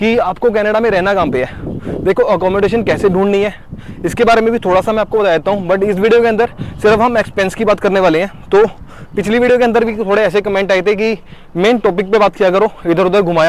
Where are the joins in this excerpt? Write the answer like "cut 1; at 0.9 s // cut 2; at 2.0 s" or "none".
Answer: none